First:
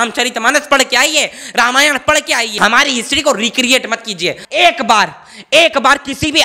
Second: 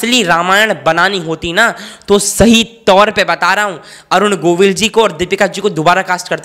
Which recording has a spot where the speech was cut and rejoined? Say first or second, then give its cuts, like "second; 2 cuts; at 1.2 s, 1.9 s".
first; 2 cuts; at 2.6 s, 4.4 s